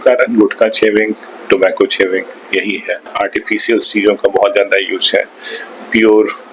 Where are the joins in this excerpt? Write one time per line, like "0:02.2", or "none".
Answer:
0:03.1